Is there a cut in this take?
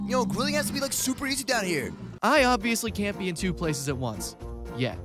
yes; 1 cut; at 2.0 s

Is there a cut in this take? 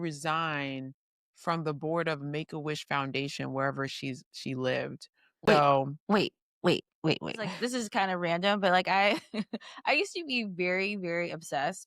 yes; 2 cuts; at 5.3 s, 7.5 s

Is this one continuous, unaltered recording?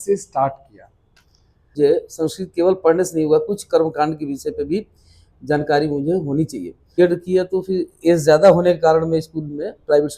no; 2 cuts; at 1.7 s, 7.0 s

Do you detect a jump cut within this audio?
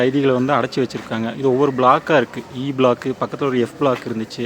no; 0 cuts

